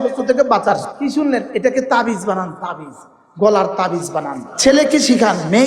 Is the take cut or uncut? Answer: cut